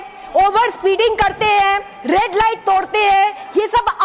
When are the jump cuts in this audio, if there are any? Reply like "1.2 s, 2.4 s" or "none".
none